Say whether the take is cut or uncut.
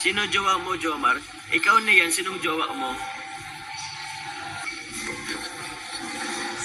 cut